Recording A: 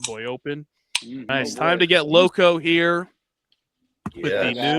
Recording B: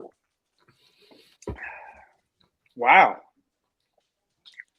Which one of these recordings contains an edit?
A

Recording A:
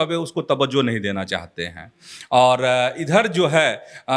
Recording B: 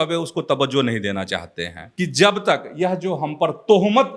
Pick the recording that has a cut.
B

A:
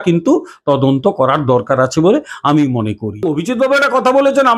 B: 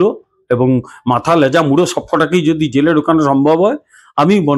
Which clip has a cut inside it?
A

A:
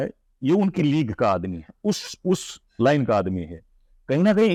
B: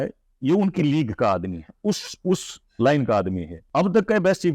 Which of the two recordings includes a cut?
B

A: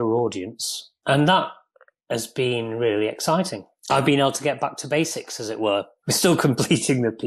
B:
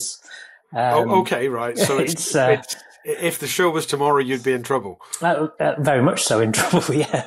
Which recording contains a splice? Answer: A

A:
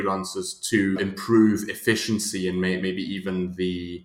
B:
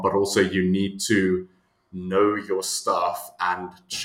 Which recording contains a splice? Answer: A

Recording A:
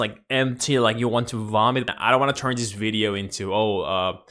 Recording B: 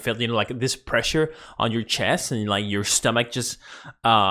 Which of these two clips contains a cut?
A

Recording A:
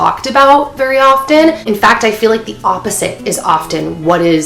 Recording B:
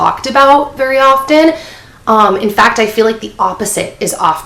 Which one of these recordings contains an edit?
A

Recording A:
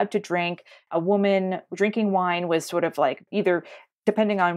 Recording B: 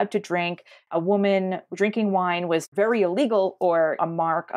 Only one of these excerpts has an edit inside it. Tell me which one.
B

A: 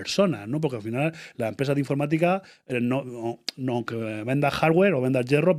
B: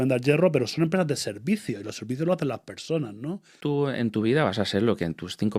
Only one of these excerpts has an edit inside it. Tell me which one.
B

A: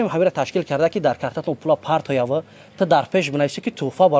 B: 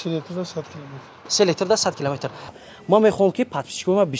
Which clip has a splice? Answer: B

